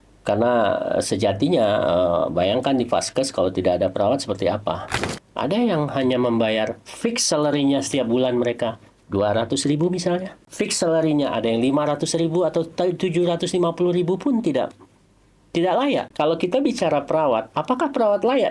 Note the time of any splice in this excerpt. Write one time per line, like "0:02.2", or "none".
0:05.1
0:10.4
0:16.1